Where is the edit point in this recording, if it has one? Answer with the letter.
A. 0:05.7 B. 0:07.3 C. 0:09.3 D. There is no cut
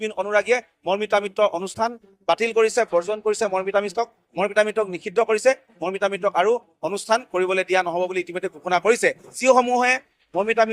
C